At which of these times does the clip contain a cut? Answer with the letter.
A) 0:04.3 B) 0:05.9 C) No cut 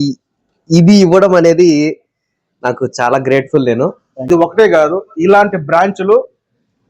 A